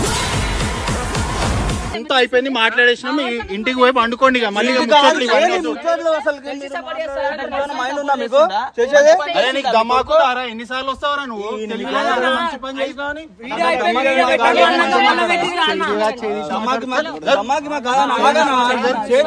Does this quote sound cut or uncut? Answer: cut